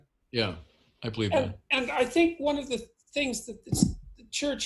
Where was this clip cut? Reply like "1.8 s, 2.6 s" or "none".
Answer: 1.9 s